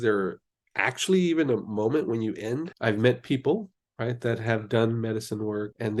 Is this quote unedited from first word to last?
no; 1 cut; at 2.7 s

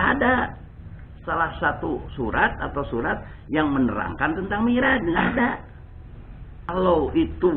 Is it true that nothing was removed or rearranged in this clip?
no; 1 cut; at 6.7 s

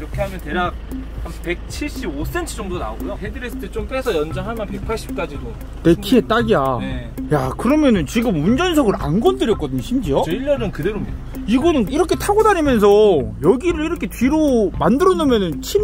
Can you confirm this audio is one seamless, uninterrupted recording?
yes; 0 cuts

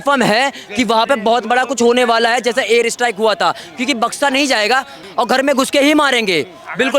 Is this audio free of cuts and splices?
no; 1 cut; at 5.0 s

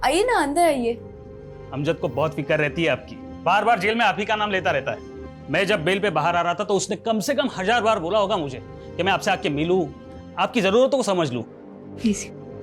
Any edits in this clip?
no; 0 cuts

